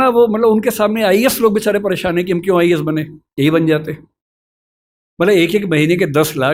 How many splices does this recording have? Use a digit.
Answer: 0